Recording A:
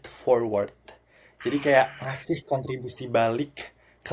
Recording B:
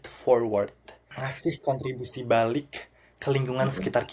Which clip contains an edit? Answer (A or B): B